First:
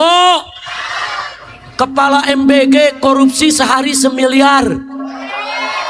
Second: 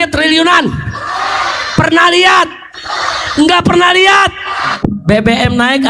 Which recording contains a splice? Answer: second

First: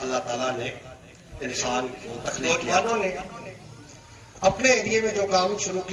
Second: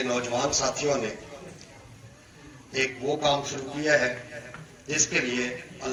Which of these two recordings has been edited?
first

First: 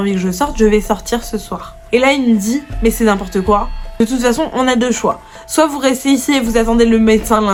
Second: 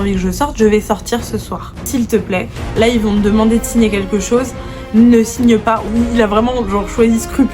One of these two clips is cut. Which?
second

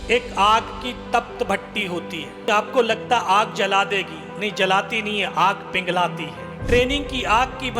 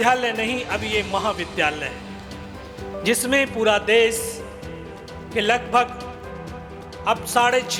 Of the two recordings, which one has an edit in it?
first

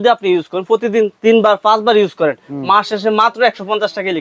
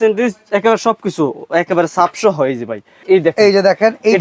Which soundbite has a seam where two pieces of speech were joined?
second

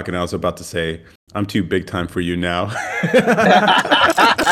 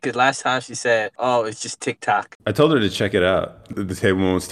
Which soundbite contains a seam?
second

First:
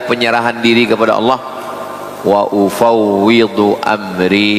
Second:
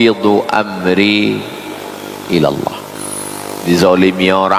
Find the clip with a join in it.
second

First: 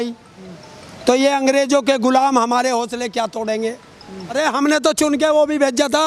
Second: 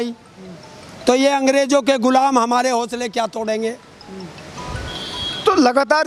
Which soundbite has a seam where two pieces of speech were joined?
first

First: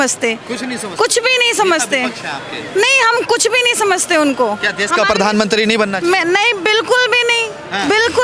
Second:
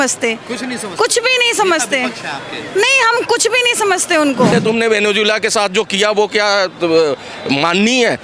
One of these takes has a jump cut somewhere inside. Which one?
second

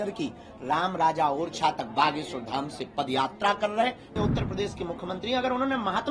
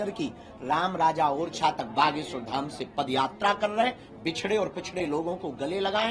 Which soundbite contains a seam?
first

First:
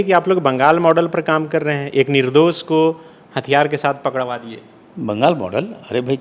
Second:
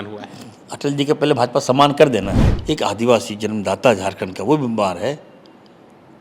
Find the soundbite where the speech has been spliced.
second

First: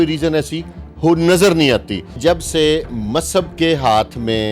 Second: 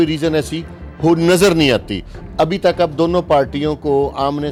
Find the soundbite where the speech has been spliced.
first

